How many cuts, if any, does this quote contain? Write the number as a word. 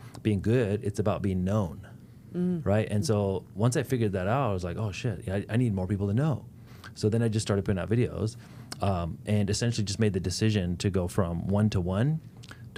zero